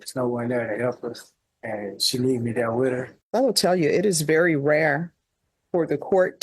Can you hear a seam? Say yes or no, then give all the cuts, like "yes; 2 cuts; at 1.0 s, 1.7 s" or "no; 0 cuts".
yes; 1 cut; at 3.2 s